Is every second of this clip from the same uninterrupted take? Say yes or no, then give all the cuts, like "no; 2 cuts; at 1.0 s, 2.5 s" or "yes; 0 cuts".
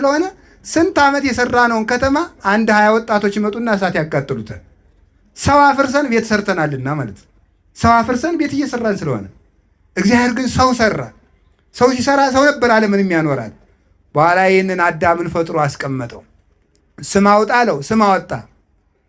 yes; 0 cuts